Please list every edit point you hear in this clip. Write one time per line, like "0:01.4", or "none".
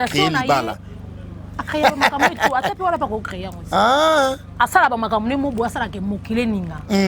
none

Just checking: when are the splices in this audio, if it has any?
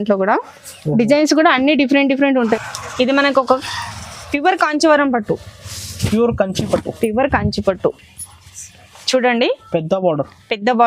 0:02.6

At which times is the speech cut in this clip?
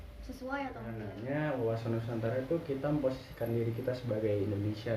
0:01.1

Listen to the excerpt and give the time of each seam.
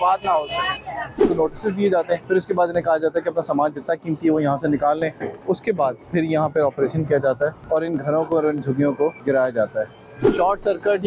0:01.3
0:02.2
0:05.7
0:07.6
0:09.2
0:10.4

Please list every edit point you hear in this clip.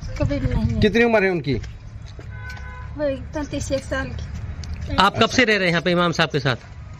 none

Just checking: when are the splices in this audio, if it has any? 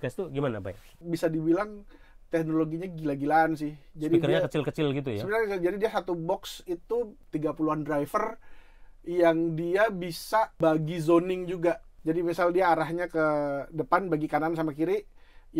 0:00.9
0:07.2
0:10.5
0:11.9

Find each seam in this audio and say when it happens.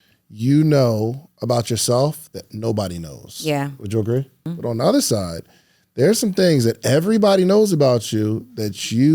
0:04.5

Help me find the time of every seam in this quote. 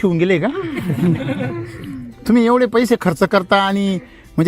none

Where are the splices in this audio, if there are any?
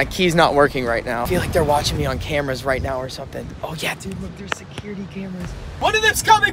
0:01.2
0:05.6

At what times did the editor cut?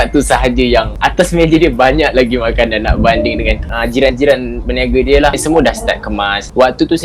0:01.0

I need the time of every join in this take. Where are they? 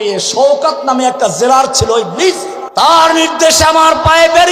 0:02.5

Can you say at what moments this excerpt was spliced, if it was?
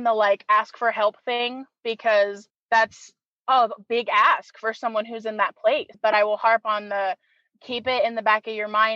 0:02.5
0:05.9

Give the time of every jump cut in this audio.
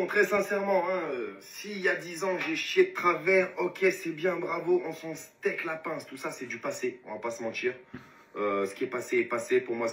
none

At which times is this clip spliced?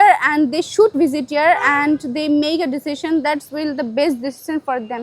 0:00.9

